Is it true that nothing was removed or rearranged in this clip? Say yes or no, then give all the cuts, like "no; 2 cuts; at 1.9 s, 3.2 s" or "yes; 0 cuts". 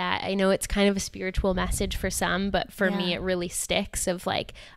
yes; 0 cuts